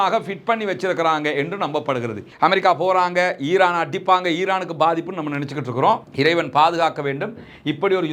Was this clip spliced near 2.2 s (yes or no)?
yes